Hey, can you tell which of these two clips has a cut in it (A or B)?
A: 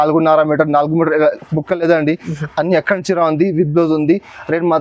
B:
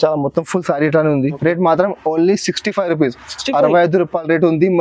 B